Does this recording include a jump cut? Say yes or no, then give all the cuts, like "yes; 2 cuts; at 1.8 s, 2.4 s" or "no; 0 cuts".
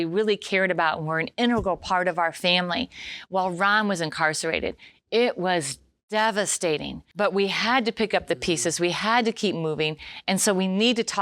yes; 1 cut; at 7.0 s